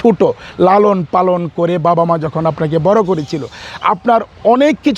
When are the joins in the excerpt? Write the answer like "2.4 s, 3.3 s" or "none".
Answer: none